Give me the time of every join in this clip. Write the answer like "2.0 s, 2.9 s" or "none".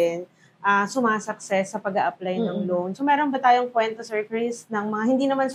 none